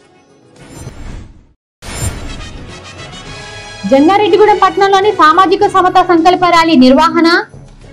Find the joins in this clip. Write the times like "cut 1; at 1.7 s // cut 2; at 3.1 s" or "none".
cut 1; at 1.4 s // cut 2; at 3.8 s